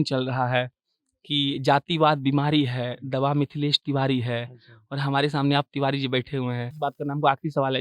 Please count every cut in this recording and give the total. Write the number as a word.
one